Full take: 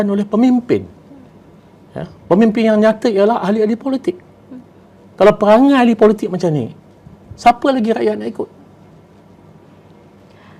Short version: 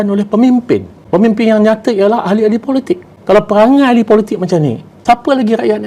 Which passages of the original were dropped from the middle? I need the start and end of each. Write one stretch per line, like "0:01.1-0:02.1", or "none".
0:00.9-0:02.1
0:04.3-0:05.0
0:06.8-0:07.2